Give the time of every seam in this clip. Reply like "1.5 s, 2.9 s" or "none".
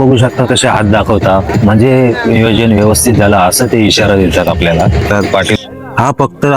5.6 s